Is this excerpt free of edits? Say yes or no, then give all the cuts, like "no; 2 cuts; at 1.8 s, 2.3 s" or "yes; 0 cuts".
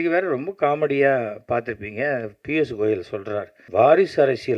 no; 1 cut; at 3.6 s